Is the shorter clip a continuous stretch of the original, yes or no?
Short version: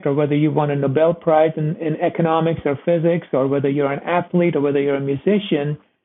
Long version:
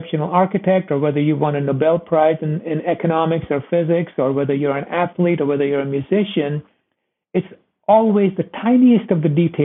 yes